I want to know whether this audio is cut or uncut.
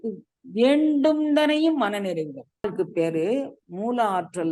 cut